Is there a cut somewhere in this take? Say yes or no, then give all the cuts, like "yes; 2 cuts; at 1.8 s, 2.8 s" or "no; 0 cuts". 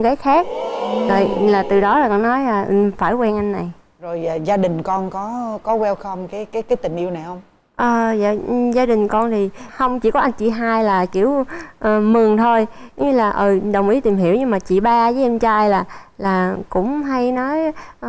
no; 0 cuts